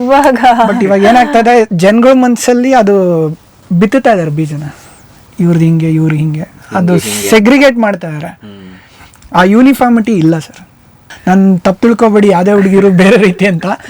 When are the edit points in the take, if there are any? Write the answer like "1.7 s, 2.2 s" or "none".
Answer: 11.1 s

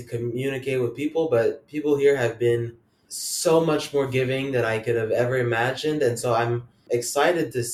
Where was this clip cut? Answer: none

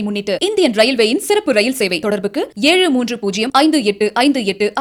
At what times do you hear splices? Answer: none

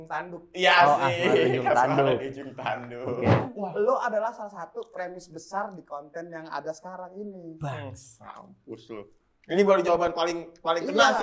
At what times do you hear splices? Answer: 3.5 s

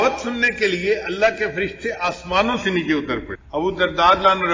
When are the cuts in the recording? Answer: 3.4 s

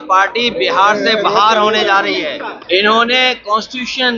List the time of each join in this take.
2.5 s

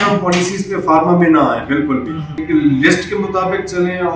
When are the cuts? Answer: 2.4 s

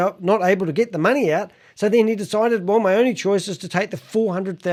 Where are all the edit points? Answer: none

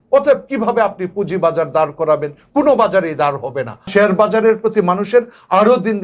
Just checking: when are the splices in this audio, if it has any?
3.8 s

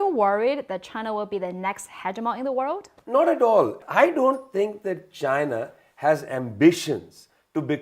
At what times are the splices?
2.9 s, 3.8 s

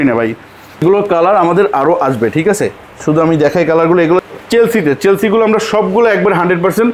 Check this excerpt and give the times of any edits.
0.8 s, 4.2 s

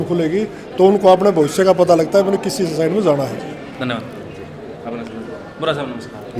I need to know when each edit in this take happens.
none

